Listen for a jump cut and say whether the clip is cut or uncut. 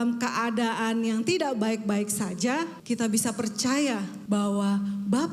cut